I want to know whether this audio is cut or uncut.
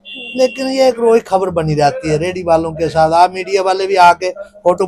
uncut